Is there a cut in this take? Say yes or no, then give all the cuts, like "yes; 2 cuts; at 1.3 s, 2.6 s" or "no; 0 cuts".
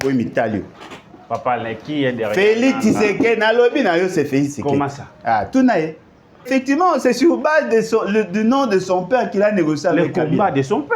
yes; 1 cut; at 6.5 s